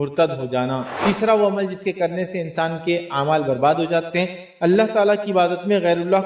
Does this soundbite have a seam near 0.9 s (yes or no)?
yes